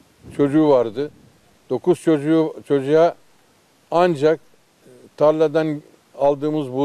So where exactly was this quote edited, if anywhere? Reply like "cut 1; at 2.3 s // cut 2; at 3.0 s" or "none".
none